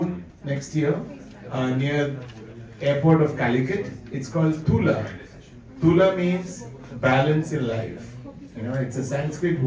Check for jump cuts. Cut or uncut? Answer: uncut